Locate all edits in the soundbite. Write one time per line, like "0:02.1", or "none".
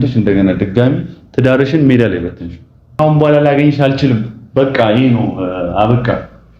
0:03.0